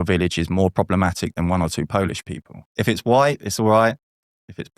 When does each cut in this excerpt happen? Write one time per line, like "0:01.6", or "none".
0:02.8